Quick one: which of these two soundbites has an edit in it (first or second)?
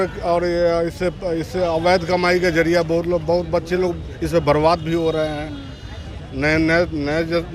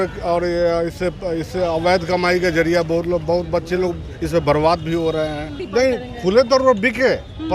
second